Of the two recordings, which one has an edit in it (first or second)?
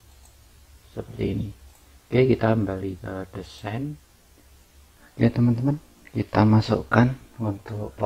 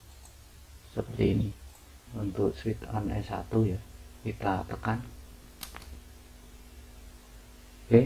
second